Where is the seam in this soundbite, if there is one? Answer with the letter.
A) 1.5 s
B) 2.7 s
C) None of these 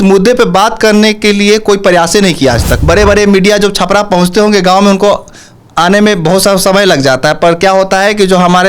B